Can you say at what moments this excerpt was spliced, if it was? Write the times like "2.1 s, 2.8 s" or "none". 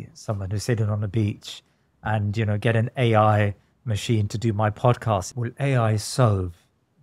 5.3 s